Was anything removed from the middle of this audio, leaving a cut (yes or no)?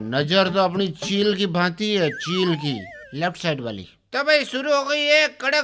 yes